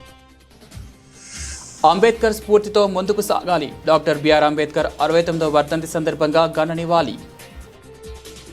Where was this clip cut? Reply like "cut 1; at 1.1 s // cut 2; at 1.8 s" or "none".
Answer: cut 1; at 1.4 s